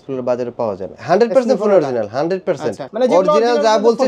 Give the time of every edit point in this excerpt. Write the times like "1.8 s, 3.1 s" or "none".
0.9 s, 2.8 s